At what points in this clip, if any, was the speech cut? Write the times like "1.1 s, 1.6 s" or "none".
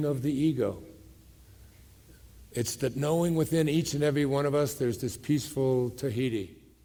none